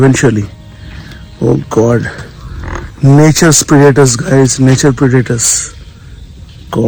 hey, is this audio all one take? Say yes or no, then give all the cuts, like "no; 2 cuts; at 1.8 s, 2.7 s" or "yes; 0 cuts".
yes; 0 cuts